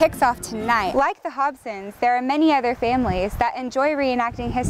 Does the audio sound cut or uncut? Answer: cut